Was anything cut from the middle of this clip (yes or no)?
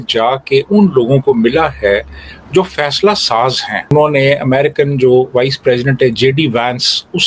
yes